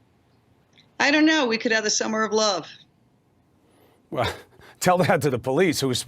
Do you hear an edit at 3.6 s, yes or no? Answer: yes